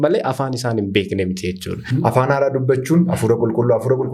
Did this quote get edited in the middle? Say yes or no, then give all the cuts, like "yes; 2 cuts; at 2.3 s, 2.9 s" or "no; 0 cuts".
yes; 1 cut; at 1.9 s